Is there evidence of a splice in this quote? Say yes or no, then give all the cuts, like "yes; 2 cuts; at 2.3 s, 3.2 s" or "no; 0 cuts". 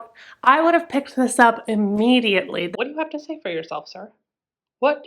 yes; 1 cut; at 2.7 s